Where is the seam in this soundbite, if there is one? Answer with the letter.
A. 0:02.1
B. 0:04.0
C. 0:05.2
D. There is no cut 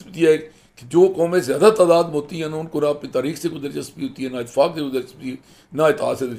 D